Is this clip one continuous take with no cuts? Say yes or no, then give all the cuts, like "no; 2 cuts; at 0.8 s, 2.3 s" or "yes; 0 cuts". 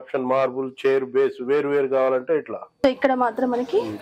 no; 1 cut; at 2.6 s